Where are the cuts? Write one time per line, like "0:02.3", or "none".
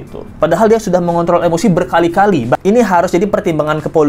0:02.6